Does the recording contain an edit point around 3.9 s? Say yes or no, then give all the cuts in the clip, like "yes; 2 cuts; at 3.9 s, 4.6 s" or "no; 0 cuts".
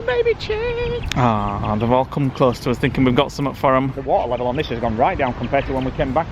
no; 0 cuts